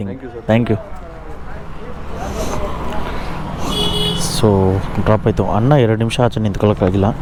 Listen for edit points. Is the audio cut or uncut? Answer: uncut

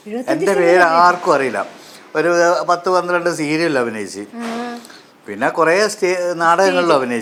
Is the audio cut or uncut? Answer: uncut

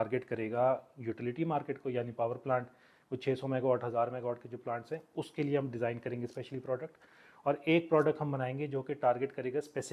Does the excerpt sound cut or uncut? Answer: uncut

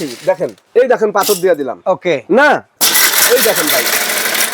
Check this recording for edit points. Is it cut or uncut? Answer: cut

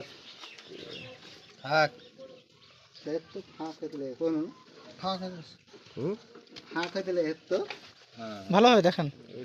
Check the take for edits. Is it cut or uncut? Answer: uncut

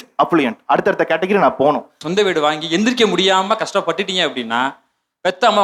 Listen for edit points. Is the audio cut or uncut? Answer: cut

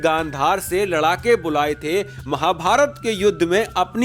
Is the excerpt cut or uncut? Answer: uncut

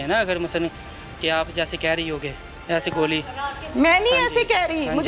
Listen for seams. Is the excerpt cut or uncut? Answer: uncut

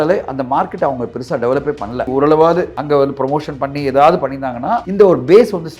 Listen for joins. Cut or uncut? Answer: cut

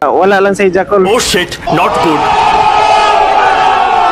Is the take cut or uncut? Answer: uncut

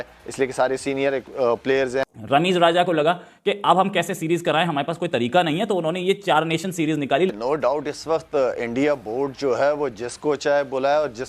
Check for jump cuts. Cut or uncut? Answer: cut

